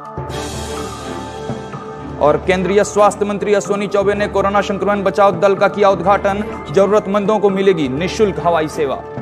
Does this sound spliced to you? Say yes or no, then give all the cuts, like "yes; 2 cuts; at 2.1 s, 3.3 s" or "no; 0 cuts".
no; 0 cuts